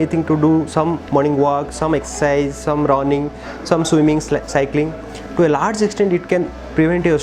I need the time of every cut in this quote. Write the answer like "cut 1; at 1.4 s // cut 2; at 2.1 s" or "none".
none